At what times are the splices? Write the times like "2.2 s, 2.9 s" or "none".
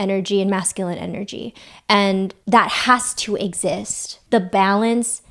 4.1 s